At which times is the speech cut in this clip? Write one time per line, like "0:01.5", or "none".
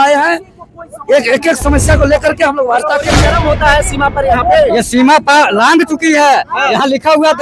0:03.1

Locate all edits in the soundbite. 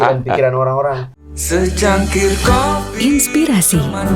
0:01.1

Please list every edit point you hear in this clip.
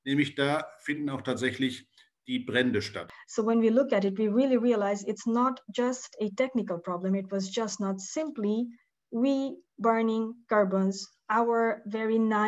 0:03.0

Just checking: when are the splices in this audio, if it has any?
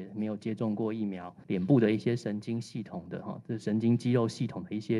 0:01.3

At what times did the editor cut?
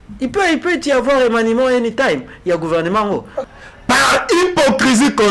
0:03.4

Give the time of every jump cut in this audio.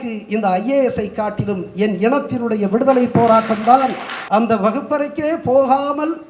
0:04.1

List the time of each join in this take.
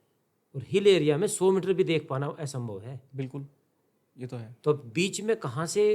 none

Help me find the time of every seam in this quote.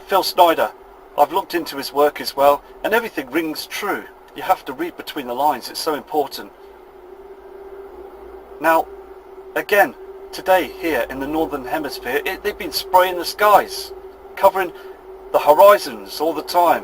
0:07.3

